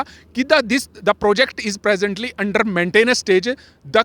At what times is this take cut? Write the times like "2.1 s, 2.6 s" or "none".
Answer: none